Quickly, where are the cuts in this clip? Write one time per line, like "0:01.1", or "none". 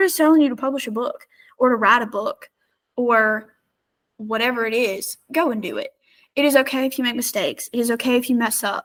none

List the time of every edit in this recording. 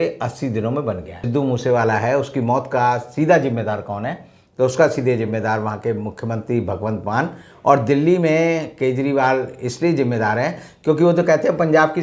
0:01.2

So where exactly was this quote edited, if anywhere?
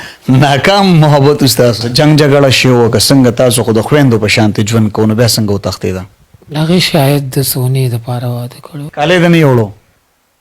0:01.9
0:08.9

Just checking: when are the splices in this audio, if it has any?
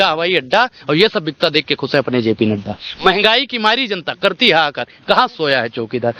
none

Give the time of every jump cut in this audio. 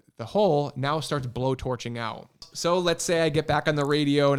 0:02.5

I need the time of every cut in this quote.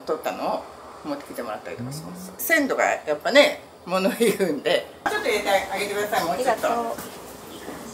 0:02.4
0:04.9

